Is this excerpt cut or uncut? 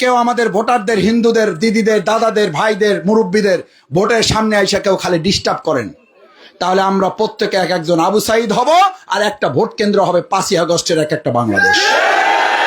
uncut